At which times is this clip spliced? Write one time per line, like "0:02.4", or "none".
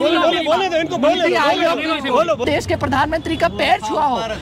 0:02.4